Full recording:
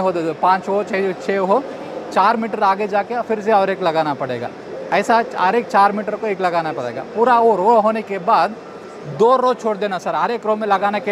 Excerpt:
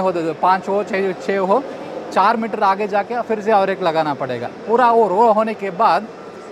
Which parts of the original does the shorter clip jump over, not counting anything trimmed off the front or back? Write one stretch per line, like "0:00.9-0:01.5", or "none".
0:04.5-0:07.0